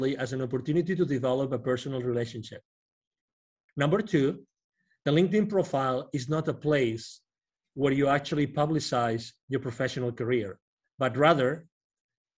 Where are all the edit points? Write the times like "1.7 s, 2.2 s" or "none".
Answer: 3.6 s

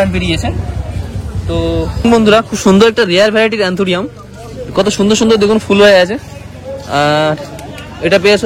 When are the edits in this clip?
1.9 s

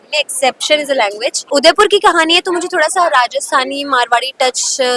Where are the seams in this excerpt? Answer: 1.5 s

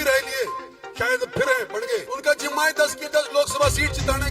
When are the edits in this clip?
2.1 s

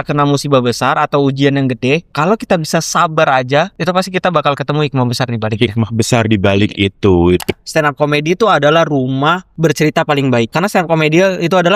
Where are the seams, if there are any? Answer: 2.1 s, 3.7 s, 7.5 s, 9.5 s, 10.5 s

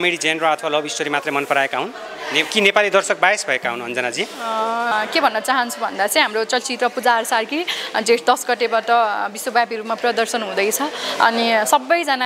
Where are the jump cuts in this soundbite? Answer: 4.9 s

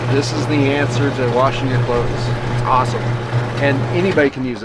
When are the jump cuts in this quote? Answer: none

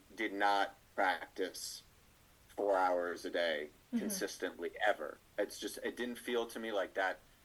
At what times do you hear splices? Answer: none

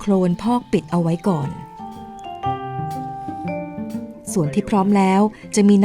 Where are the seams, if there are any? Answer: 4.2 s

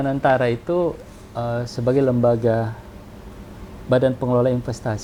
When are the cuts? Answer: none

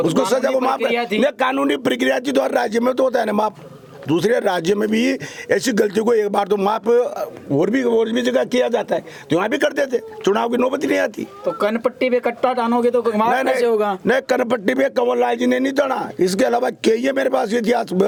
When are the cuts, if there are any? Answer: none

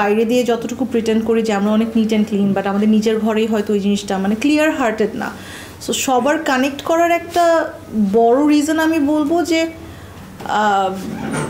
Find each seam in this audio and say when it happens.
none

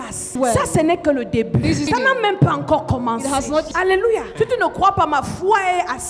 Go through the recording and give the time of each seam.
none

